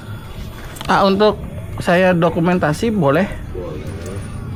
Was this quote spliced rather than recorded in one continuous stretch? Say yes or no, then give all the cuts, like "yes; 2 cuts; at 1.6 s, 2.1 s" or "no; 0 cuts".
no; 0 cuts